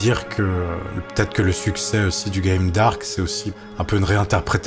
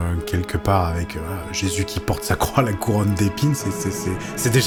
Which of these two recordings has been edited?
first; 2 cuts; at 1.0 s, 3.5 s

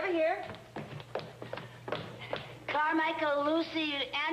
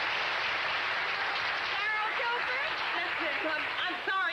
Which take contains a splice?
first; 1 cut; at 1.1 s

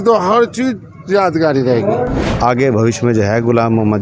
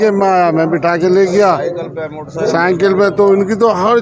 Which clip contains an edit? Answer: first; 1 cut; at 2.3 s

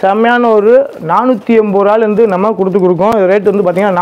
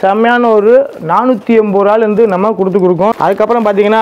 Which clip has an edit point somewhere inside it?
second; 1 cut; at 3.1 s

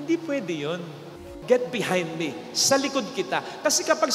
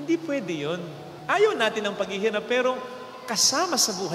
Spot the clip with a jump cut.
first; 1 cut; at 1.2 s

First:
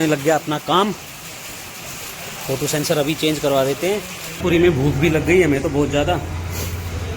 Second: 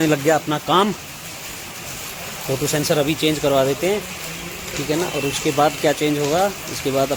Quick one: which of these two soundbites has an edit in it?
first; 1 cut; at 4.4 s

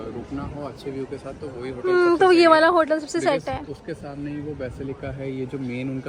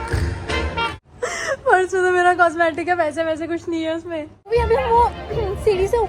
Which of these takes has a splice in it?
second; 2 cuts; at 0.9 s, 4.3 s

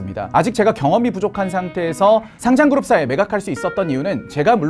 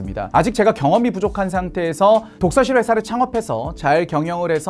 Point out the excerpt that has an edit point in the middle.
first; 1 cut; at 2.3 s

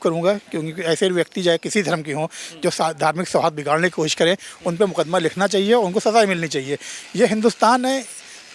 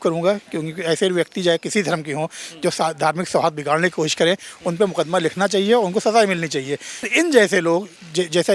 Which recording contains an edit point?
second; 1 cut; at 7.1 s

